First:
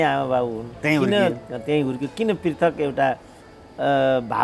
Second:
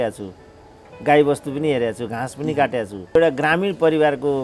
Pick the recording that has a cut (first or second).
second